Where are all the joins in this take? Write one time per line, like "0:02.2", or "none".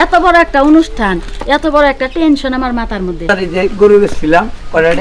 0:03.3